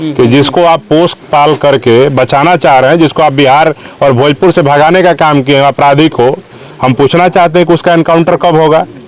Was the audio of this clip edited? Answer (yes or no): no